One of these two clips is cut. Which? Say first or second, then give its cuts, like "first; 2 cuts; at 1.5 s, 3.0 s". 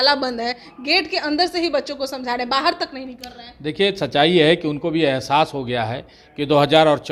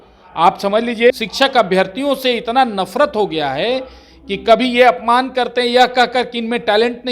second; 1 cut; at 1.1 s